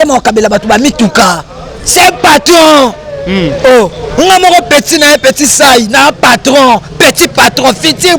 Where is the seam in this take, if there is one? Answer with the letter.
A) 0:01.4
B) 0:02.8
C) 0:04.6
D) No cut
D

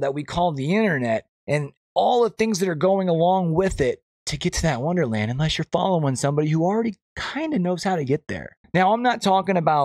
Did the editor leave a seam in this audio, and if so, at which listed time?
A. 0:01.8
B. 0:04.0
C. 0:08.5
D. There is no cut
D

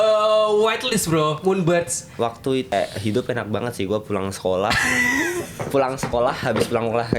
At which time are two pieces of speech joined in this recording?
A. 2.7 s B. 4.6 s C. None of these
A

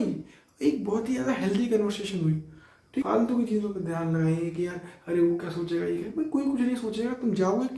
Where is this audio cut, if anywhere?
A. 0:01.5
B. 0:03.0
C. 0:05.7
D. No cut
B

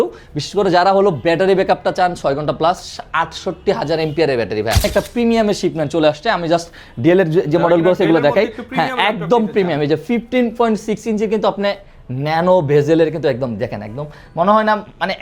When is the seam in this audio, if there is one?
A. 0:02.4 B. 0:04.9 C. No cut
B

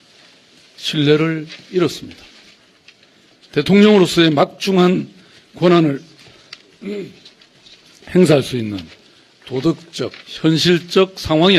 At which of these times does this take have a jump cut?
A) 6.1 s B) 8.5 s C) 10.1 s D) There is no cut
B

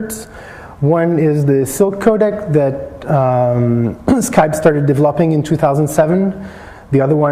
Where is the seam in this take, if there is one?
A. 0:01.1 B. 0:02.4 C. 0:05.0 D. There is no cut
B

